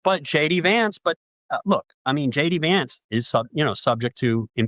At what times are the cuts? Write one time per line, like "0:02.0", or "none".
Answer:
none